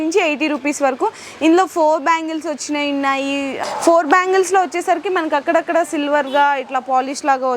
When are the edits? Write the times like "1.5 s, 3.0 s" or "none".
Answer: 3.5 s